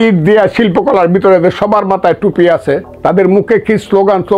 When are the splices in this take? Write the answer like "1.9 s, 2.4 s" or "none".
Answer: 2.9 s